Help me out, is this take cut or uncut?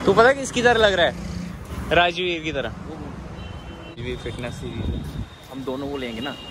uncut